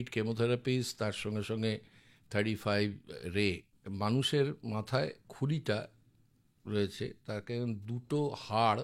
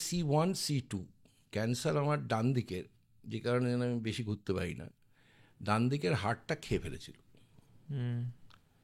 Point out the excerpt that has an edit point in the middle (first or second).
first